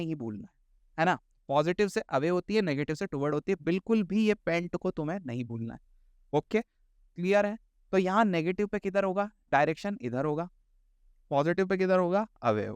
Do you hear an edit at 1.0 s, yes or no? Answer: no